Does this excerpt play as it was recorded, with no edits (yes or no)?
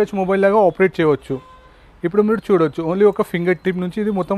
yes